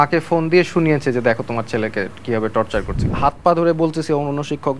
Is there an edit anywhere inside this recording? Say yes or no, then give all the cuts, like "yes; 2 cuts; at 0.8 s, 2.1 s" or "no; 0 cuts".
yes; 1 cut; at 3.0 s